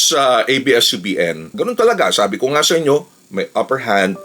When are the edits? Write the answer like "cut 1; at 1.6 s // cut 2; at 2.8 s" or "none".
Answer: cut 1; at 1.5 s